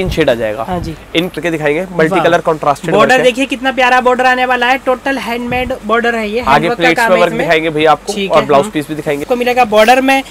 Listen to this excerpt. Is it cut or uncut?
cut